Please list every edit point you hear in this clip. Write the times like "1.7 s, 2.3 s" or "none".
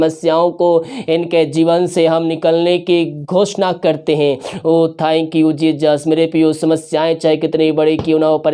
none